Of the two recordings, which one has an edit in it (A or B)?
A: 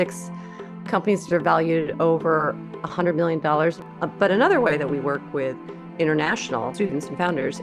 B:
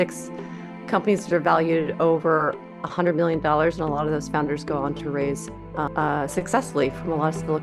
A